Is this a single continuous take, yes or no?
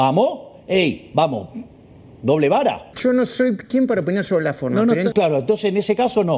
no